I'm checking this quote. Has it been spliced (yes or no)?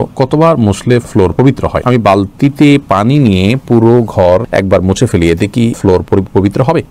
no